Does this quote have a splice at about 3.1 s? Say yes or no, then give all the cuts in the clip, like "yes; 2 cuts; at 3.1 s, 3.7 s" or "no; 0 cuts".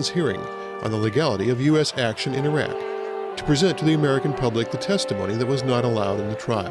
yes; 1 cut; at 3.1 s